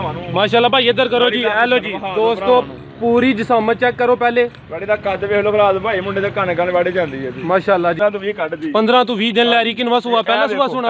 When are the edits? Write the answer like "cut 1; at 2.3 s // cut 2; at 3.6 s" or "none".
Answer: cut 1; at 8.0 s

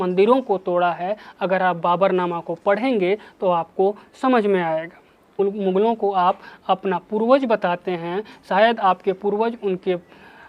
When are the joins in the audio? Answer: cut 1; at 5.4 s

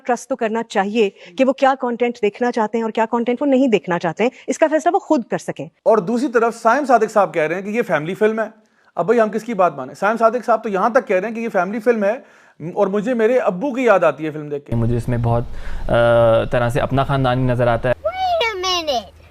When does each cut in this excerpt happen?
cut 1; at 14.7 s

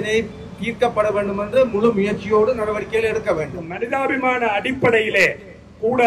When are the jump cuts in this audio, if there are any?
cut 1; at 3.8 s

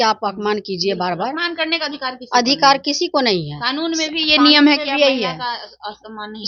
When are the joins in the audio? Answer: none

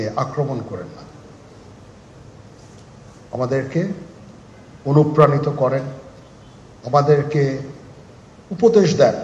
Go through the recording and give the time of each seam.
cut 1; at 2.2 s

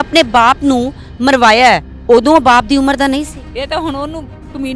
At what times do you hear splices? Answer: cut 1; at 1.9 s // cut 2; at 3.4 s

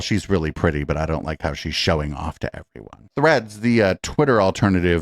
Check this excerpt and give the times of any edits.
cut 1; at 3.0 s

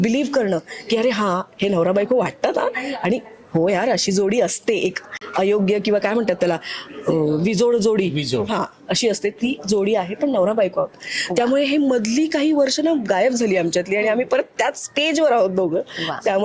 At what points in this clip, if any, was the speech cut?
none

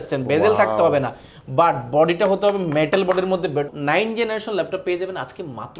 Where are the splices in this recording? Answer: cut 1; at 3.7 s

